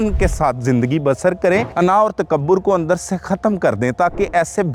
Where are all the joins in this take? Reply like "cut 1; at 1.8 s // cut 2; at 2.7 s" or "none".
cut 1; at 1.7 s